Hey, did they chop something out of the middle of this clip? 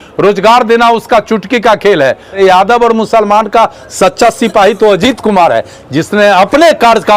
yes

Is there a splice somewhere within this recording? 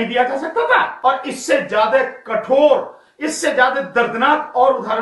yes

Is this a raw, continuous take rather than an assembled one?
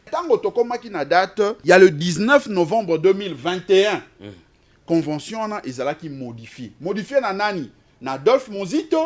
no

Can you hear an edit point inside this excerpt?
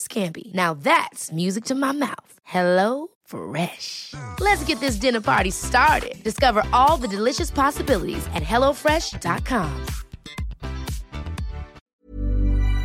yes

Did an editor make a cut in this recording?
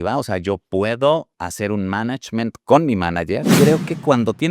yes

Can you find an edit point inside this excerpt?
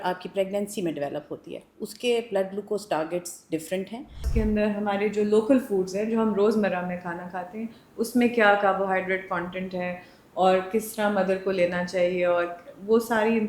yes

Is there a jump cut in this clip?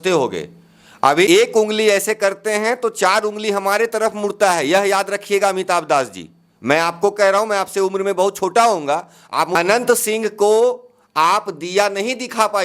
yes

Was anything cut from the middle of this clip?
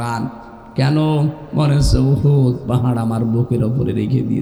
no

